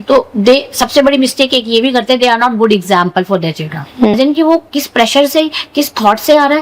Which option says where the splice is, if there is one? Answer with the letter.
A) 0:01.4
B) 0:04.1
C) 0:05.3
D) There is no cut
B